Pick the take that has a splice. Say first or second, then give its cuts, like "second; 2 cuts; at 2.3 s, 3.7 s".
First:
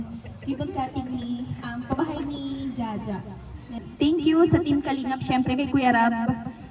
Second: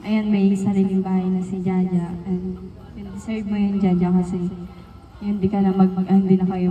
first; 1 cut; at 3.8 s